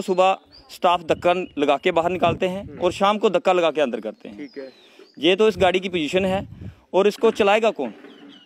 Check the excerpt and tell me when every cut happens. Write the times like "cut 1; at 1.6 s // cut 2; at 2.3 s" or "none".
none